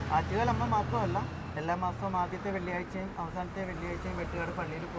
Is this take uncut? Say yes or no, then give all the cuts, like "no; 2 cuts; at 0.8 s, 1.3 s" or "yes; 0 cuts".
yes; 0 cuts